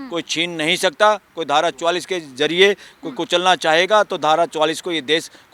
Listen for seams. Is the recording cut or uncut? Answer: uncut